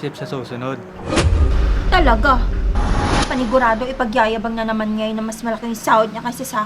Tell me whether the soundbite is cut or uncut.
uncut